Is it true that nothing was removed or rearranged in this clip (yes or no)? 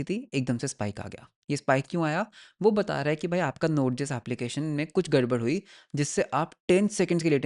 yes